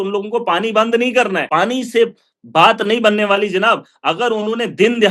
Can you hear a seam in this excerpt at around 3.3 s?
no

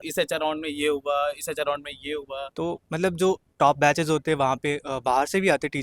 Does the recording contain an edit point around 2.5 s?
yes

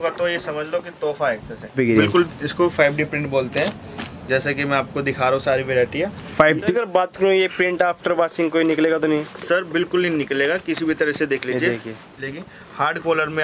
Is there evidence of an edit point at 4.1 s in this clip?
no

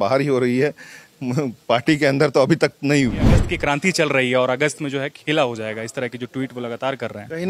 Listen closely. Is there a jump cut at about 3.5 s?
yes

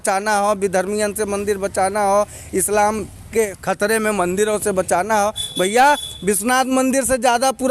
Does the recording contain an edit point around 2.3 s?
no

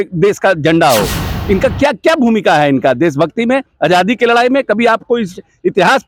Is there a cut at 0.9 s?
no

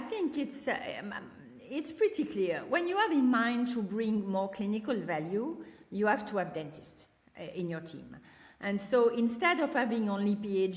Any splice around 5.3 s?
no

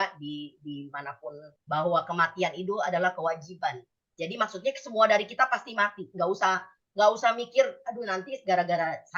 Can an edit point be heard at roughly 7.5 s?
no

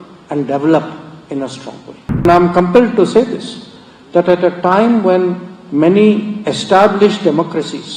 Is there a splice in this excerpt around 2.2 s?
yes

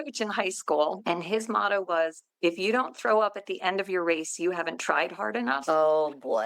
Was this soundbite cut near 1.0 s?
yes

